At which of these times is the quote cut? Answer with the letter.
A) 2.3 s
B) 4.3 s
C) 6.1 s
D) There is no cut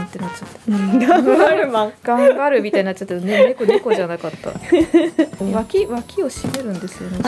D